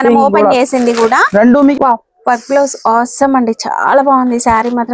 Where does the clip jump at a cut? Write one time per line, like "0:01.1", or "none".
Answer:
0:01.7

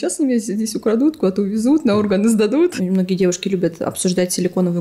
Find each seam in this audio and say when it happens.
0:02.7

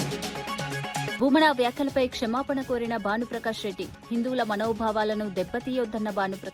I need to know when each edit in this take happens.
0:01.1

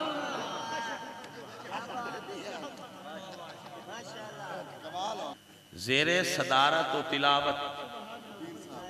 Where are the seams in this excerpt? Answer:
0:05.3

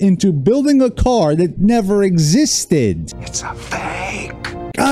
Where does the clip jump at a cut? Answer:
none

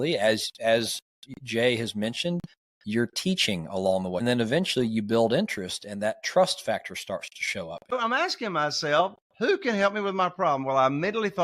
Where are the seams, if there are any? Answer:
0:04.2
0:07.9

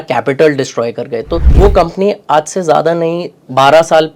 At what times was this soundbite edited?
0:01.4

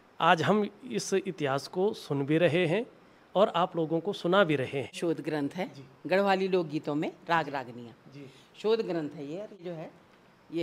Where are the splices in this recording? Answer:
0:05.0
0:09.6

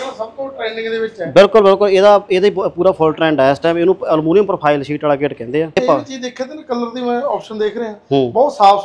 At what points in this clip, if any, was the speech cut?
0:05.8

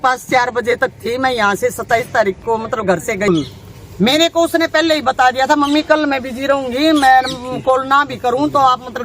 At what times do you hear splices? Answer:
0:03.3

